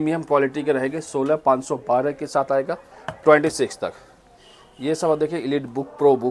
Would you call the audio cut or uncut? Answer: uncut